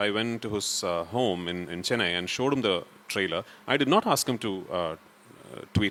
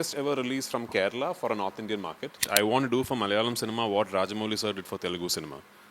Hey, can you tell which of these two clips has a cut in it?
second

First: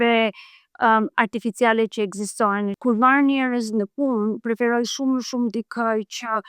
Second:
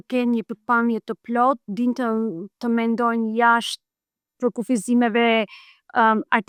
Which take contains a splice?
first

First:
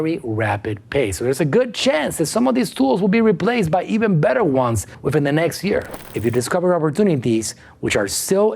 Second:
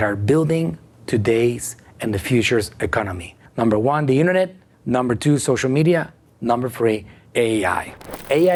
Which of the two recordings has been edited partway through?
first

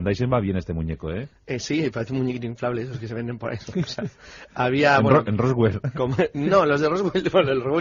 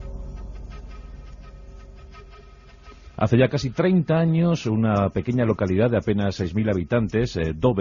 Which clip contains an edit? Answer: first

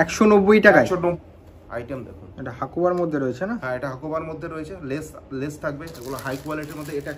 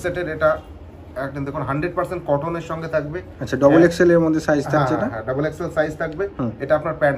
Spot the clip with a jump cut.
first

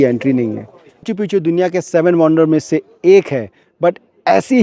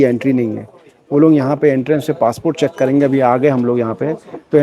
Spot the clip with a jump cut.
first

